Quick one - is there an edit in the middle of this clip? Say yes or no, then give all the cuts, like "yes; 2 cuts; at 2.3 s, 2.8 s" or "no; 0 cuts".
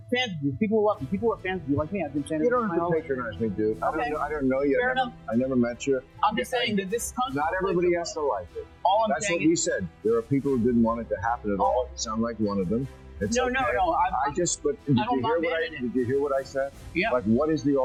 no; 0 cuts